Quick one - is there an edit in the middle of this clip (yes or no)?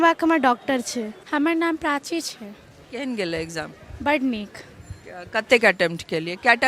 yes